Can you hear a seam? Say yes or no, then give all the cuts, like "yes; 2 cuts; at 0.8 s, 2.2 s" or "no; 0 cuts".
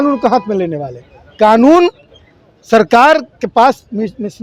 no; 0 cuts